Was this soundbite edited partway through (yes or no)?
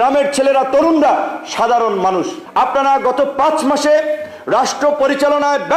yes